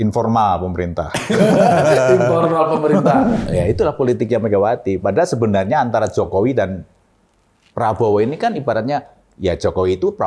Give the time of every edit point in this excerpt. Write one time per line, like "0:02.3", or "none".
0:03.4

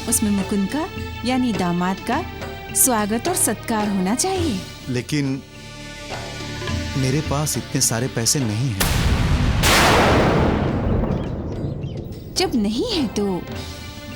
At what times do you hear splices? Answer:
none

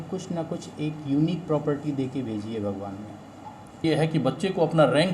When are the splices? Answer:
0:03.9

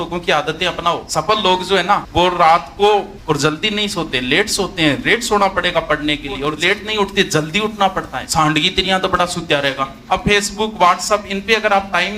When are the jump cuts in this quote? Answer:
0:01.0
0:02.1
0:03.1
0:06.5
0:08.2
0:09.9

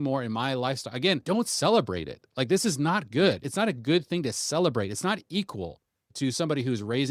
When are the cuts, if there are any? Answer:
0:01.2
0:03.5
0:06.1

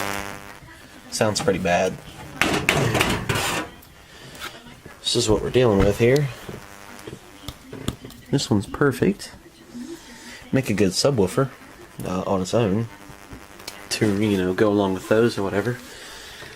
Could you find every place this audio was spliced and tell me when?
0:15.0

